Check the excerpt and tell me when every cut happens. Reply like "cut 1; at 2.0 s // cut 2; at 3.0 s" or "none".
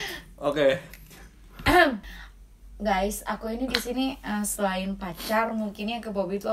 cut 1; at 2.0 s